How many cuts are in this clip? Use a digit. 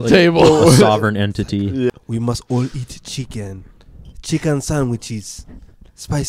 1